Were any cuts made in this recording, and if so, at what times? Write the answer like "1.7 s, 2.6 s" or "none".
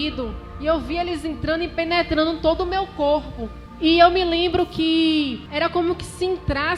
3.6 s, 5.4 s